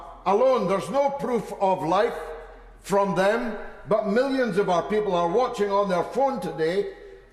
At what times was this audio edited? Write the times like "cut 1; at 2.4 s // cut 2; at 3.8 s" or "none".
none